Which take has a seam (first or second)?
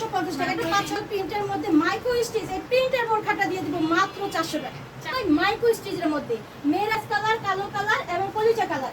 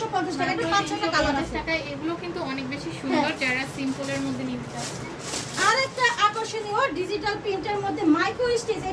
first